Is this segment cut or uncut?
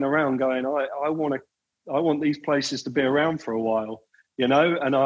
uncut